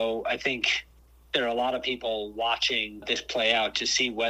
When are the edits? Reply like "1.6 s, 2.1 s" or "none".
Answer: 3.0 s